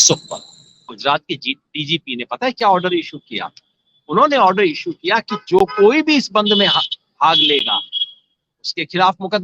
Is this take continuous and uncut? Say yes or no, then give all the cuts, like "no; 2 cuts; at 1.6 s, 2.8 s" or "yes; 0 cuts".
no; 1 cut; at 0.9 s